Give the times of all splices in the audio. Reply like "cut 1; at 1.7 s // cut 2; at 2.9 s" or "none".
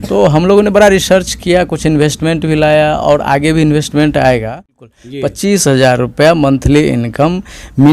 cut 1; at 4.9 s